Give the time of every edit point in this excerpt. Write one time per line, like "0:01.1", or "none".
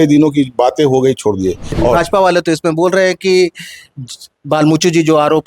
0:01.7